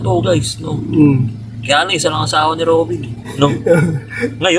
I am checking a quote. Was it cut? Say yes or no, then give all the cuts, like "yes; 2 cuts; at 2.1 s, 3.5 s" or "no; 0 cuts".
no; 0 cuts